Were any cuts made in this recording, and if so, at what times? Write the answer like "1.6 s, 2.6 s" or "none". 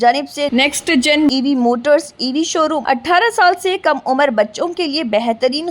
2.8 s

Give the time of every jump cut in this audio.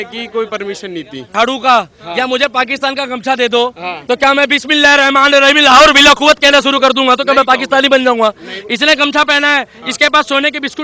1.3 s

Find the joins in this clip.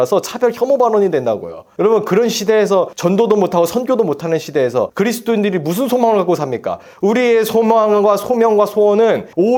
none

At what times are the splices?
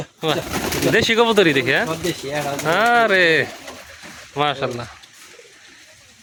none

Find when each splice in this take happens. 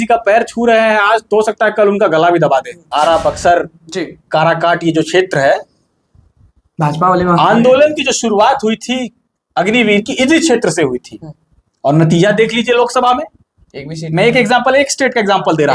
2.9 s

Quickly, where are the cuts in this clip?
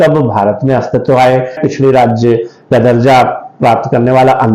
1.6 s

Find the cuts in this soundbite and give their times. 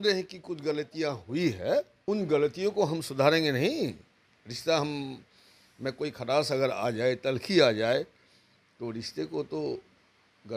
1.9 s

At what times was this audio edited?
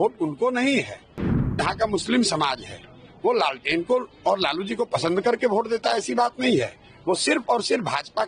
none

